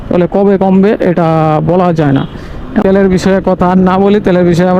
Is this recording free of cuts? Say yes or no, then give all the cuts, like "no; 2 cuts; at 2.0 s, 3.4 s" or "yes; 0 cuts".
no; 1 cut; at 2.8 s